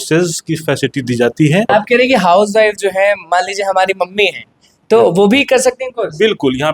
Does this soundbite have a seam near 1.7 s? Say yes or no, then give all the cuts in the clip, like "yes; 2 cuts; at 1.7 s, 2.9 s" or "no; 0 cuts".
yes; 1 cut; at 1.7 s